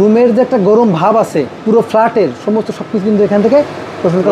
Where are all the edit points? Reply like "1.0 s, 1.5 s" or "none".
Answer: 1.5 s